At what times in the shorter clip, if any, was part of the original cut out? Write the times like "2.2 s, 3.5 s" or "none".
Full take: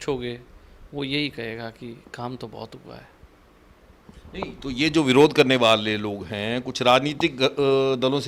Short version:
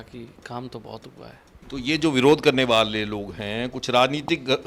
1.6 s